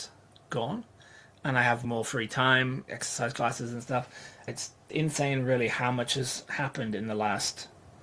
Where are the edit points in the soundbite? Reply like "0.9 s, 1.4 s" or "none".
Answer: 1.8 s, 2.9 s, 4.4 s